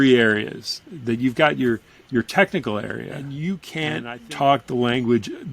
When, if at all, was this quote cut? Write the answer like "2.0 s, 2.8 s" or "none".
3.2 s